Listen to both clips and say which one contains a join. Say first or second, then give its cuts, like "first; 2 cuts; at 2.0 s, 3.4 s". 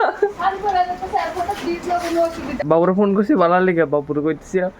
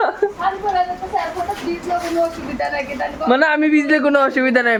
first; 1 cut; at 2.6 s